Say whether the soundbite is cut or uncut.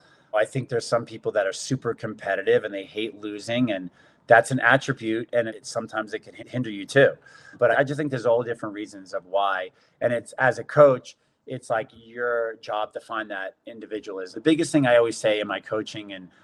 uncut